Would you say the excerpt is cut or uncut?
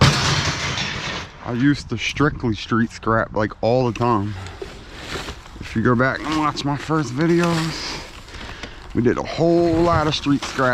uncut